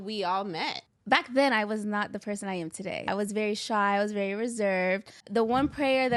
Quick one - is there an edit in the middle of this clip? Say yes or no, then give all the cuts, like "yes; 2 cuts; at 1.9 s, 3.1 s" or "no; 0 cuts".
yes; 3 cuts; at 0.9 s, 3.1 s, 5.2 s